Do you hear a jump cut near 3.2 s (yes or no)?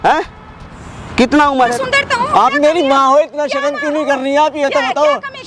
no